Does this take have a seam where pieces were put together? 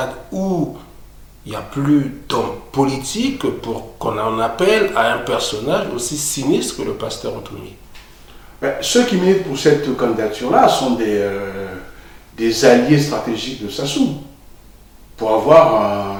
no; 0 cuts

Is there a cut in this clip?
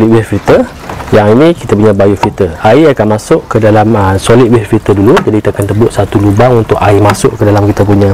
no; 0 cuts

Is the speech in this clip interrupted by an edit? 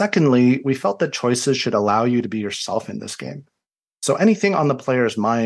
no; 0 cuts

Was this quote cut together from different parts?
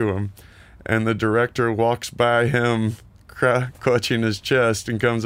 no; 0 cuts

